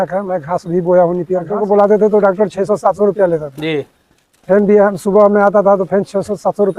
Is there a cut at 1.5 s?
yes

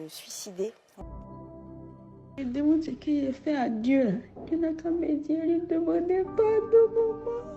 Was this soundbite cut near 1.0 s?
yes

